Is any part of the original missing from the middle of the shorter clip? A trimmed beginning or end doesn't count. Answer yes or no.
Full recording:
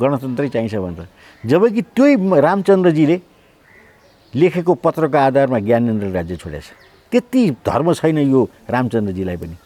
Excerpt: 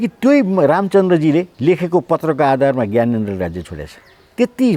yes